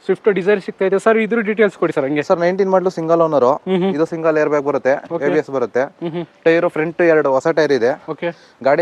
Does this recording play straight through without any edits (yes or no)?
yes